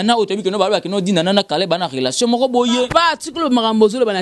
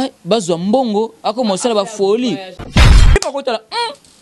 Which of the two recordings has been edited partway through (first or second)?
second